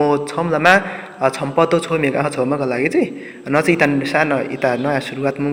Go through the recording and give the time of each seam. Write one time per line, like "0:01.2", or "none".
none